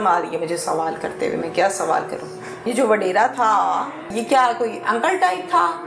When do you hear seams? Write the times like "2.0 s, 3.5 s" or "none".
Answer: 2.6 s, 4.2 s